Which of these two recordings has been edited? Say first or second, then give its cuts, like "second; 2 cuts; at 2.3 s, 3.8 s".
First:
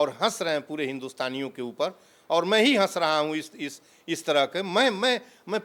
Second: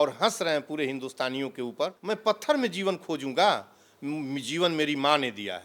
second; 1 cut; at 2.0 s